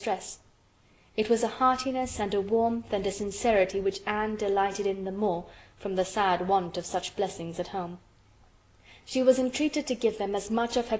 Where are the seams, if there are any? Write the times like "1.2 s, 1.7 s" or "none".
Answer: 9.8 s